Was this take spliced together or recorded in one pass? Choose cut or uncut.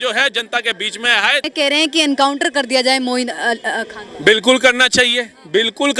cut